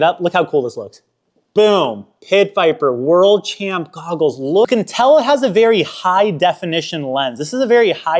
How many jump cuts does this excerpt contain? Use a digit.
1